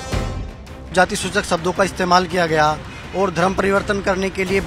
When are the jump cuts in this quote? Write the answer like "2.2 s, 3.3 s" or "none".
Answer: 0.9 s